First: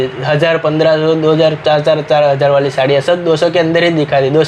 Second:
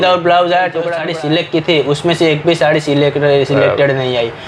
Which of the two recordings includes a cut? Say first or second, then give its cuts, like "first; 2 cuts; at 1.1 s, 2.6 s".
second; 1 cut; at 0.9 s